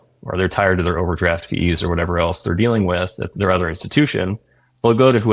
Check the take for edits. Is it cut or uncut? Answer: cut